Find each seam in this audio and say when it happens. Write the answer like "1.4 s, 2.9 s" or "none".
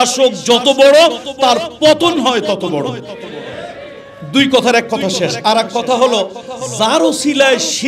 none